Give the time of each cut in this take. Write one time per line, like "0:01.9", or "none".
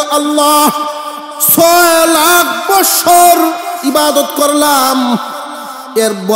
none